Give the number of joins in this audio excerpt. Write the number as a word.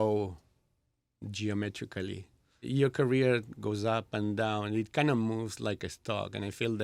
zero